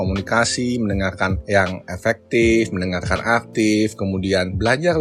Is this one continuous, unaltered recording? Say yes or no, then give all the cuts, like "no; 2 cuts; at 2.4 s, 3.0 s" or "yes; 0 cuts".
yes; 0 cuts